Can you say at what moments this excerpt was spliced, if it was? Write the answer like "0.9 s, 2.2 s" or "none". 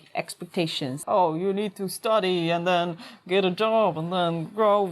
0.9 s